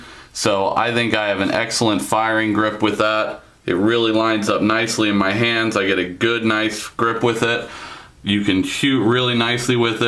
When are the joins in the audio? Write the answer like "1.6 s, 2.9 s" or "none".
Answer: 6.1 s